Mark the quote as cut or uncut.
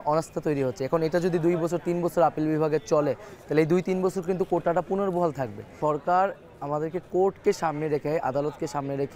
uncut